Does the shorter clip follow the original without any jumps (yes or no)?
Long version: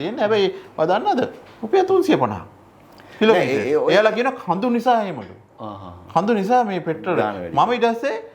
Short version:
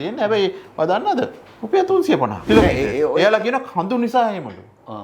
no